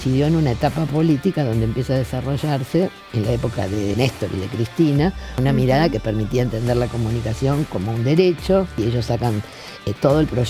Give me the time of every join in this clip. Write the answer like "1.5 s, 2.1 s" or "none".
3.9 s, 5.3 s, 8.8 s